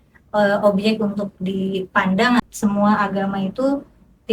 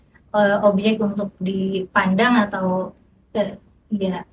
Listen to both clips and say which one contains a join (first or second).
first